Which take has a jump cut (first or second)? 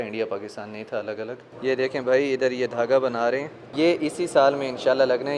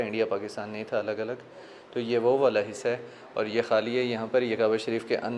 first